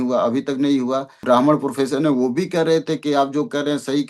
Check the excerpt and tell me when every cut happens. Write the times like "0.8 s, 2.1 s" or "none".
1.2 s